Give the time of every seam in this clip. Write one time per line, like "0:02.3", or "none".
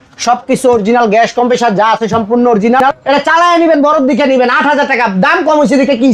0:02.9